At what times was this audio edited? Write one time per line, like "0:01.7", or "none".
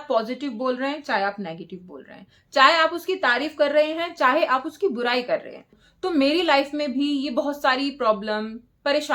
0:05.7